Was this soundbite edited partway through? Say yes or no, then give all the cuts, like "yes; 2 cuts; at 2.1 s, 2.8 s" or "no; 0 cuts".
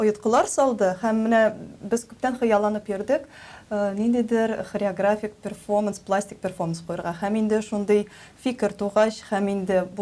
no; 0 cuts